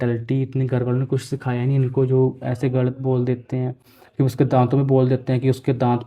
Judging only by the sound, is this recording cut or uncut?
uncut